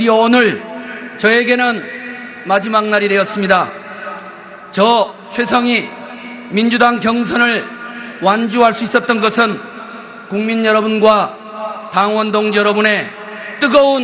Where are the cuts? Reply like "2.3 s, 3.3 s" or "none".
10.5 s